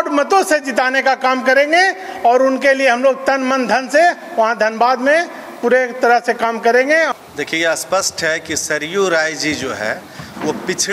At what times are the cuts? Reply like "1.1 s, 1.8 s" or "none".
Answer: 7.1 s